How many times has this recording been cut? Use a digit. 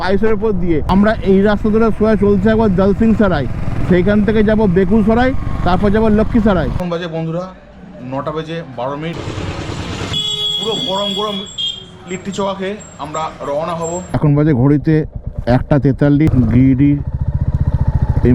6